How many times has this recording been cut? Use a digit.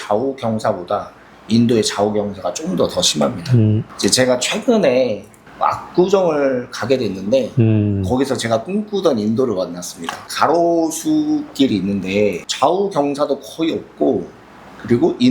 1